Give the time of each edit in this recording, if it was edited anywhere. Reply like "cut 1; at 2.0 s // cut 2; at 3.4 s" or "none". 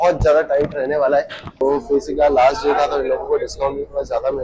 cut 1; at 1.6 s